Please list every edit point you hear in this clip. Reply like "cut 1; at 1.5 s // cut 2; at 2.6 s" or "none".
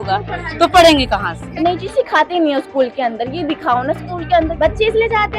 cut 1; at 1.5 s // cut 2; at 4.5 s